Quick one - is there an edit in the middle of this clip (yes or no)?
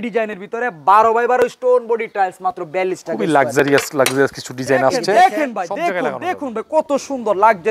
yes